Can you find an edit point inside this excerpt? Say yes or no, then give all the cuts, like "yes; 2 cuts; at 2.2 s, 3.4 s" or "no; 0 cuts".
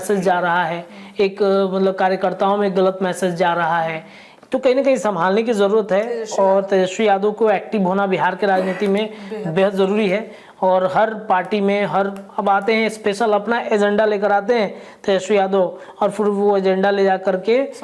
no; 0 cuts